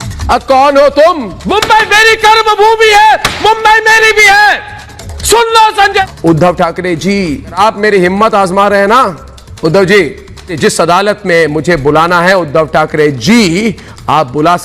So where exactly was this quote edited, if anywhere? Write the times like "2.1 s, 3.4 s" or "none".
1.4 s, 6.0 s, 7.6 s, 10.5 s